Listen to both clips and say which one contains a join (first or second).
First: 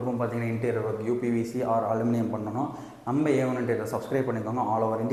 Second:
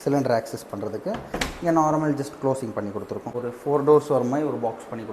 second